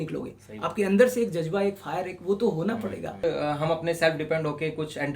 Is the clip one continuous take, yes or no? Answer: no